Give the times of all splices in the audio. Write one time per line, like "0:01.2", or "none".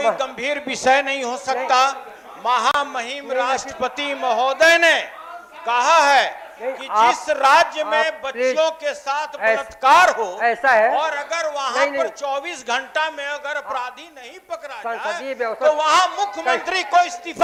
none